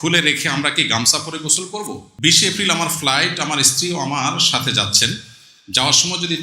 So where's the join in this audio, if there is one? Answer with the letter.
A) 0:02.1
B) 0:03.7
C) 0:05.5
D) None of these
A